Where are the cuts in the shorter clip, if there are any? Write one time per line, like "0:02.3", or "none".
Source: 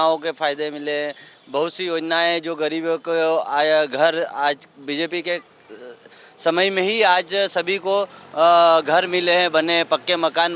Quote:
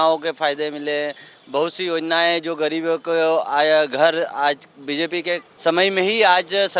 0:05.5